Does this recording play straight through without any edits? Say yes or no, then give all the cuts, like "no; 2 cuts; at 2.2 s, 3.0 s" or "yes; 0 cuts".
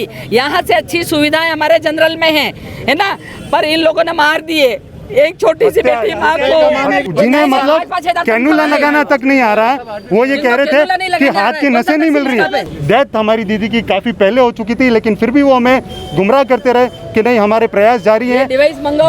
no; 2 cuts; at 7.0 s, 12.7 s